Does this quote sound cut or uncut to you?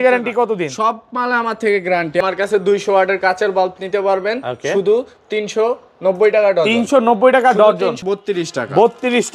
cut